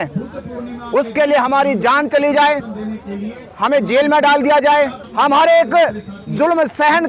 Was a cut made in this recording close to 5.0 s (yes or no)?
yes